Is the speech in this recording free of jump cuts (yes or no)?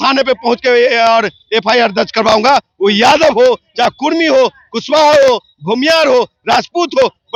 yes